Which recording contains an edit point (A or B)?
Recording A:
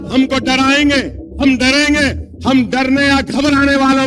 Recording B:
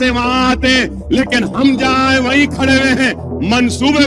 A